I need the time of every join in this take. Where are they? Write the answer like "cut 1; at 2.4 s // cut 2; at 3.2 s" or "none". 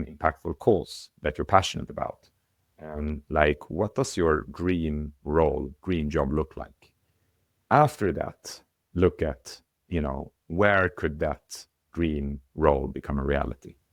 none